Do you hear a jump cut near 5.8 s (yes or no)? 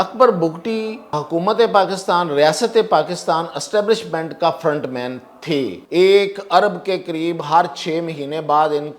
yes